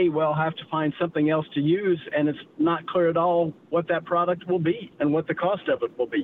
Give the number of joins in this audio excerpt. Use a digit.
1